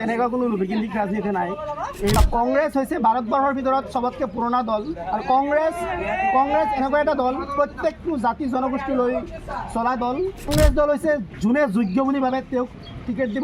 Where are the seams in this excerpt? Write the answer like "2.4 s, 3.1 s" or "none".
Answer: 2.2 s, 10.5 s